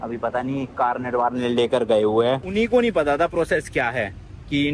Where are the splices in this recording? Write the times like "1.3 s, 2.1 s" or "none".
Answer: 2.5 s